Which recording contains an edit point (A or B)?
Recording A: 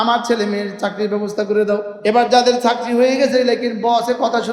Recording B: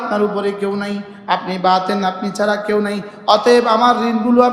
A